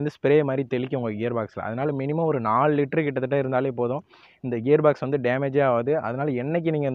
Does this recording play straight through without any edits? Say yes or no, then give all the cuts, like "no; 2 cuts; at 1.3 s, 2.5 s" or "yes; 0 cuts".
yes; 0 cuts